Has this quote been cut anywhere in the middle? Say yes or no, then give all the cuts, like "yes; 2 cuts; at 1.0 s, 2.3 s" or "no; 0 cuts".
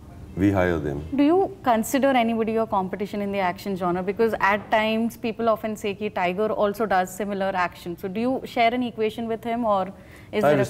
yes; 1 cut; at 1.2 s